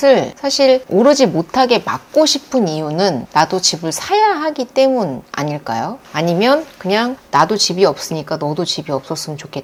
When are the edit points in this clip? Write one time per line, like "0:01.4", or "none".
none